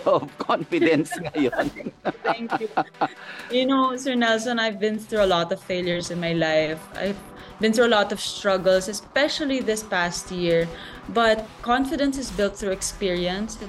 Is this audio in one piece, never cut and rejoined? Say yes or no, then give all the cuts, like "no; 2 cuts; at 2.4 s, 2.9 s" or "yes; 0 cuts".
yes; 0 cuts